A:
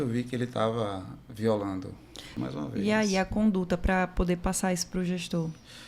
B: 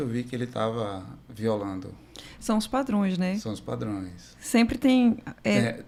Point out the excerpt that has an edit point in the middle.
A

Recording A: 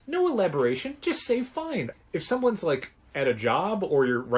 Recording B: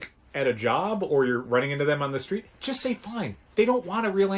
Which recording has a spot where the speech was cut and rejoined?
A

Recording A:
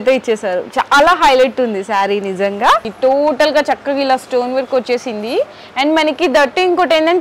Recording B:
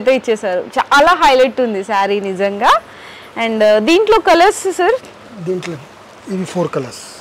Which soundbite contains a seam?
A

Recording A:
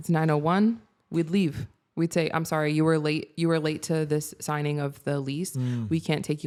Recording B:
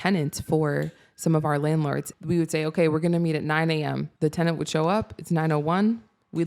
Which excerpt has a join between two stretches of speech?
B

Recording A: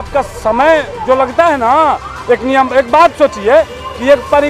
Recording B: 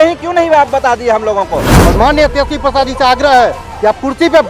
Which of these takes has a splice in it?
B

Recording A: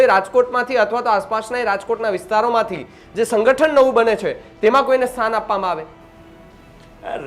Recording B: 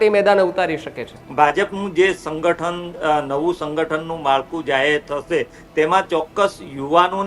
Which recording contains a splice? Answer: B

